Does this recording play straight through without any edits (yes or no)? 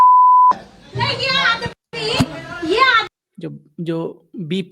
no